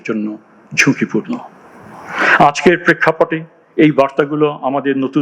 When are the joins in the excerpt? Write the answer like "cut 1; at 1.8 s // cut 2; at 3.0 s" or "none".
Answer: none